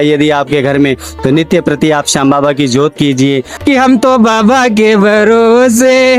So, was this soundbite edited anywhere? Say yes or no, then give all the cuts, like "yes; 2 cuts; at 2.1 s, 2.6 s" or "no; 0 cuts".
yes; 1 cut; at 3.6 s